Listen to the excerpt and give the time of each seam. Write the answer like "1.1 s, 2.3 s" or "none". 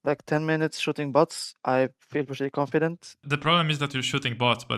3.2 s